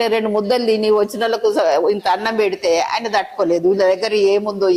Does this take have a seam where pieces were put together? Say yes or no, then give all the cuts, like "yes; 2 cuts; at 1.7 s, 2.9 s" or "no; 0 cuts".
no; 0 cuts